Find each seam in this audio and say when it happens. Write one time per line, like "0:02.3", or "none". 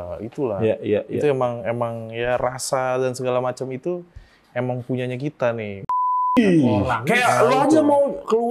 0:06.0